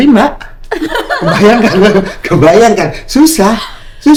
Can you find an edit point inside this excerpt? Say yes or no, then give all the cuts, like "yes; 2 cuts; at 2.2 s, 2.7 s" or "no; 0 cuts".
no; 0 cuts